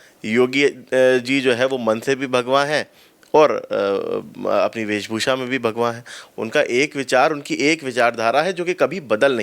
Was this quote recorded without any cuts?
yes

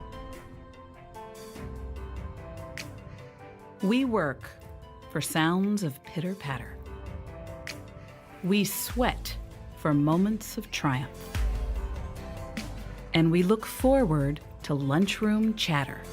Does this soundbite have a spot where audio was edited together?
yes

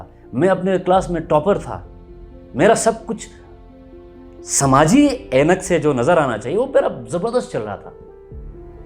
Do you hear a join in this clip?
yes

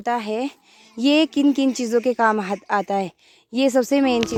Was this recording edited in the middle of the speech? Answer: no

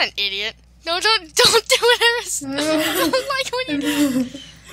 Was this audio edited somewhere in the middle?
yes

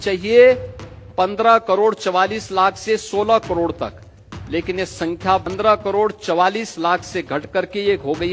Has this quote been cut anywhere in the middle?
yes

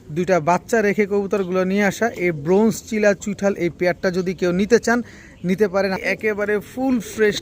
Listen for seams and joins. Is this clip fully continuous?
no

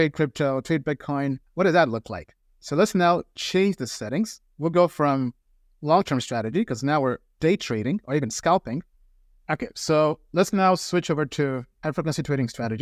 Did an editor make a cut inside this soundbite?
no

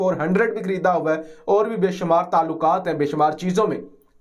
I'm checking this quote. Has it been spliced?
no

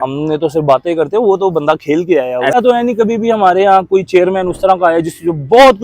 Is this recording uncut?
no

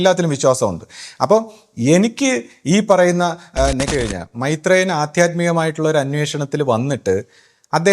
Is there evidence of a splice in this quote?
yes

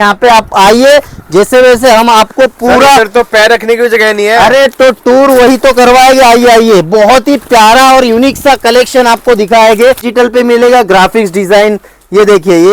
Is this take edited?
yes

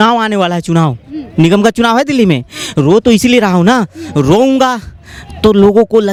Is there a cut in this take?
no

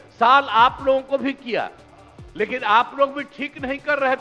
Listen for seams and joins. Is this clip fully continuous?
yes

